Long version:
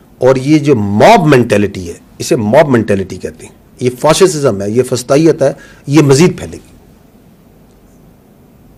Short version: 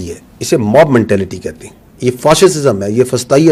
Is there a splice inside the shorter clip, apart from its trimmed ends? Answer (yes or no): no